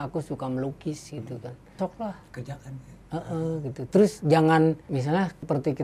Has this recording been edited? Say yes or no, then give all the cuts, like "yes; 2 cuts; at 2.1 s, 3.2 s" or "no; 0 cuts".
yes; 2 cuts; at 1.8 s, 5.0 s